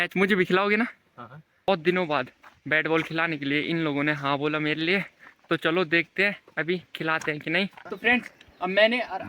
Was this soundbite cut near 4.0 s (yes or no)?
no